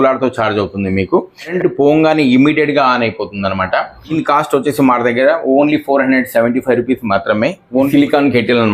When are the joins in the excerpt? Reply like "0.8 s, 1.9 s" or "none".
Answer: 1.5 s, 4.2 s, 7.9 s

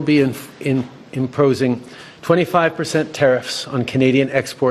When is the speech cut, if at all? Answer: 1.7 s

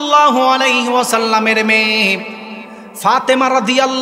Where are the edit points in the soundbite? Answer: none

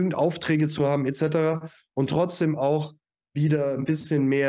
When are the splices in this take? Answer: none

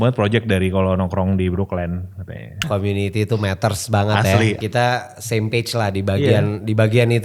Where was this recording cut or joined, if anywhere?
2.7 s, 4.6 s

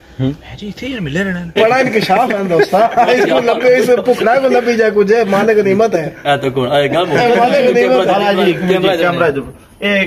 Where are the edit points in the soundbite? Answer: 1.4 s

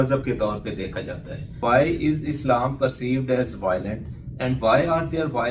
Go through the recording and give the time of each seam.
1.6 s

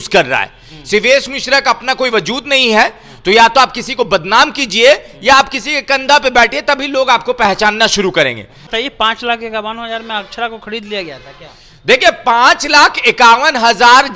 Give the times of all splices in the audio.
8.6 s

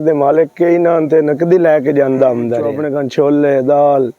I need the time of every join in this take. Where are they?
2.8 s

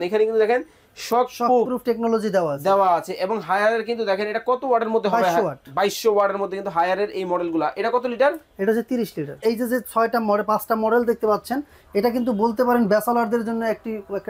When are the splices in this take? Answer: 9.4 s

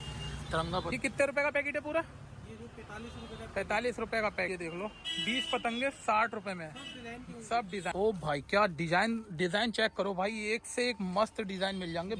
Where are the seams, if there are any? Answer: 0.9 s, 4.5 s, 7.9 s

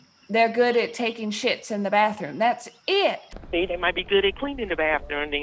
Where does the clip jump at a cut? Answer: 3.3 s

